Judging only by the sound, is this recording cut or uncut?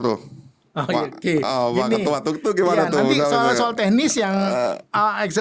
uncut